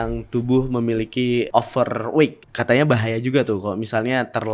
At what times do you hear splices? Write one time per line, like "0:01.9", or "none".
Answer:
0:01.5
0:02.4